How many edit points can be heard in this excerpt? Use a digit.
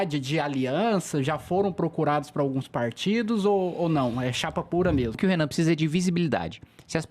1